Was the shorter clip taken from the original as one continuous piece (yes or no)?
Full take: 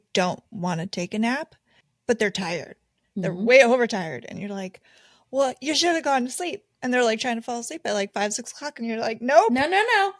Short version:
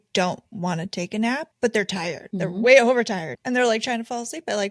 no